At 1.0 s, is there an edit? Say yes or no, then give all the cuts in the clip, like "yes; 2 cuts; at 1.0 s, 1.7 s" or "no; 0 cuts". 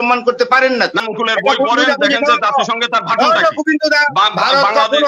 yes; 1 cut; at 1.0 s